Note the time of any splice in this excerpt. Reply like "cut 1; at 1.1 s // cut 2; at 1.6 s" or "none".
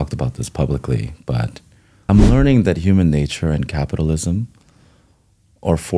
cut 1; at 2.0 s